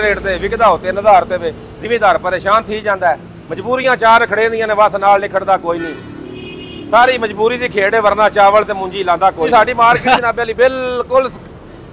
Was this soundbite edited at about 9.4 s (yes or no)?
no